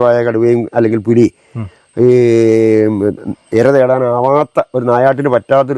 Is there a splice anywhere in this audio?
no; 0 cuts

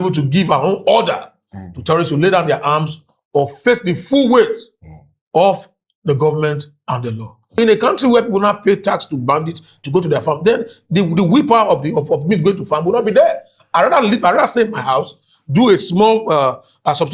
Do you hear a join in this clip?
yes; 1 cut; at 7.6 s

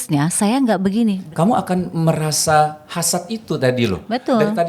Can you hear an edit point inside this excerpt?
yes; 1 cut; at 1.2 s

